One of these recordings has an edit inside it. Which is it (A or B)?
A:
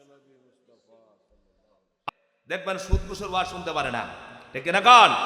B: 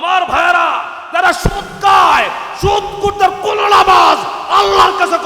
A